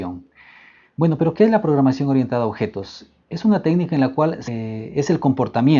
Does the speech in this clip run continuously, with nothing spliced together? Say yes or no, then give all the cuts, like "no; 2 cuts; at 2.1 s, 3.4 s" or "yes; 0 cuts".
yes; 0 cuts